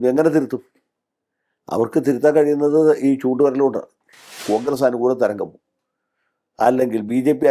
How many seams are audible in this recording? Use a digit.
1